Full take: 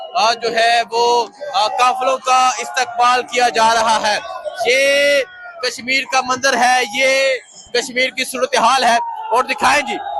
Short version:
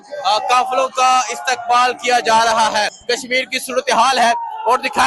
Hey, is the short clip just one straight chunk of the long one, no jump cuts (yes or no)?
no